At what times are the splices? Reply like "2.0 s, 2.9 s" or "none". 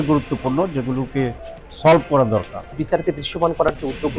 2.8 s